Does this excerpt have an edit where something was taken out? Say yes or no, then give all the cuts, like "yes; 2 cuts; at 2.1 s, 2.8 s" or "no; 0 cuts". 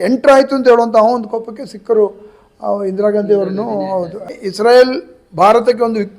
yes; 1 cut; at 4.4 s